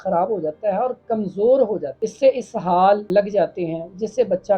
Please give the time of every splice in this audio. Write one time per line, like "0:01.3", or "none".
0:01.9
0:03.0